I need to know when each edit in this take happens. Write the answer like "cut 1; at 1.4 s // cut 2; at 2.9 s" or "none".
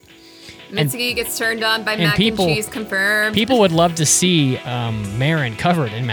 none